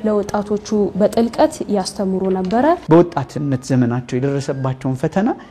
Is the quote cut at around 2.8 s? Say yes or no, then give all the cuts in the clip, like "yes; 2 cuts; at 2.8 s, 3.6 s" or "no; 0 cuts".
yes; 1 cut; at 2.8 s